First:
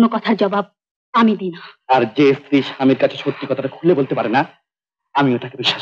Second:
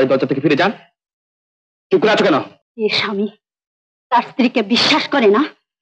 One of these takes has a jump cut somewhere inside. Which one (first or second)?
second